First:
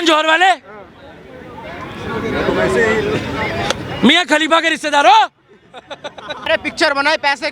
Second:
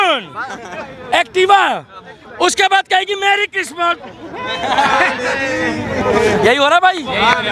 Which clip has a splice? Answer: first; 1 cut; at 6.4 s

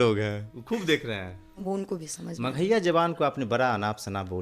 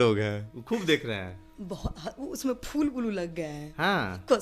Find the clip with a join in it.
first; 1 cut; at 1.6 s

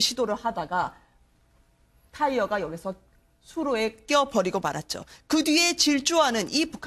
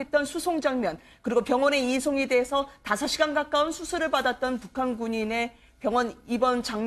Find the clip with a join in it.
second; 1 cut; at 5.2 s

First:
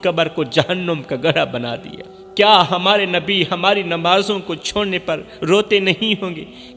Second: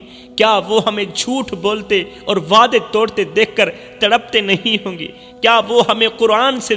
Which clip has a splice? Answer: first; 1 cut; at 2.2 s

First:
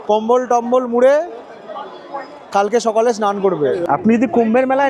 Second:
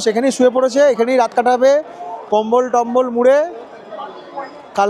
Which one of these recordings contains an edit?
first; 1 cut; at 3.8 s

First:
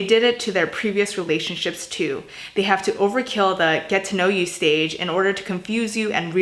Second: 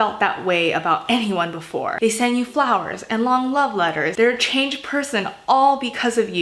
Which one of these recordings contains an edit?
second; 2 cuts; at 1.9 s, 4.1 s

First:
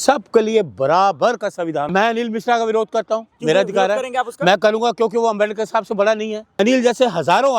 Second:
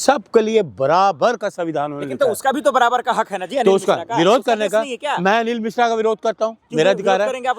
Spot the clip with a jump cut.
first; 2 cuts; at 1.9 s, 6.4 s

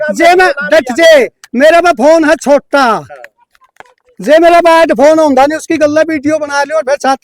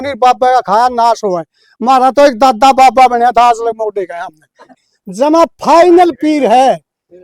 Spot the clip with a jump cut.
second; 1 cut; at 4.8 s

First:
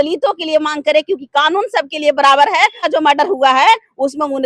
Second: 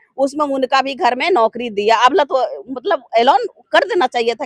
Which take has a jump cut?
first; 1 cut; at 2.8 s

